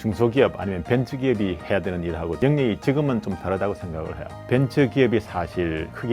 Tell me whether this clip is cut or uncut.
cut